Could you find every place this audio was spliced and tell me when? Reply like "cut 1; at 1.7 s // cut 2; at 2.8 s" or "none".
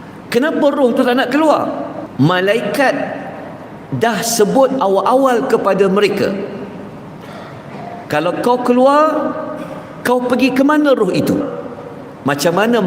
cut 1; at 2.0 s // cut 2; at 11.5 s